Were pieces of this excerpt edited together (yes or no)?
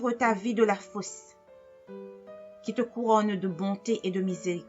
yes